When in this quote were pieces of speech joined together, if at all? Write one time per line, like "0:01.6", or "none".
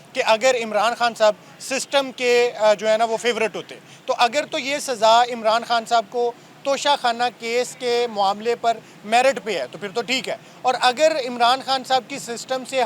none